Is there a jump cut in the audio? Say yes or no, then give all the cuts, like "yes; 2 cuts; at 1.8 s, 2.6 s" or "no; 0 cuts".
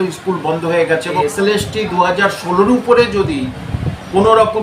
yes; 1 cut; at 1.2 s